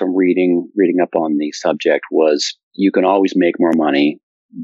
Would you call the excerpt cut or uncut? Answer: uncut